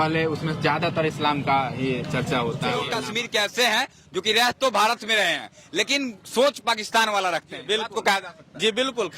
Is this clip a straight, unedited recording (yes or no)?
no